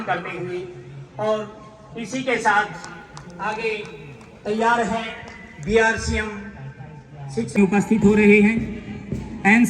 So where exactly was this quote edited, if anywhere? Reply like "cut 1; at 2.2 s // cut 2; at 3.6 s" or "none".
cut 1; at 7.6 s